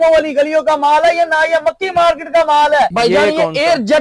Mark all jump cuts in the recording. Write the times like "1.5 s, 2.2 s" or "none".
2.9 s